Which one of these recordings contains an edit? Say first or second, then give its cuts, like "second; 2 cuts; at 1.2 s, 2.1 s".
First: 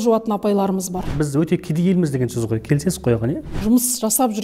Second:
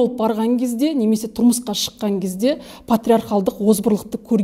first; 2 cuts; at 1.1 s, 3.4 s